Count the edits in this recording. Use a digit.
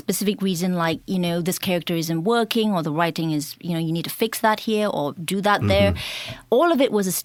0